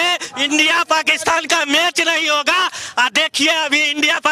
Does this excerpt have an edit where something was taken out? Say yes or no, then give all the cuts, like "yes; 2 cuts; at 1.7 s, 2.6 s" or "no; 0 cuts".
no; 0 cuts